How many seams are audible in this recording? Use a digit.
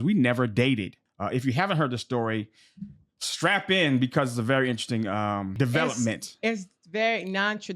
2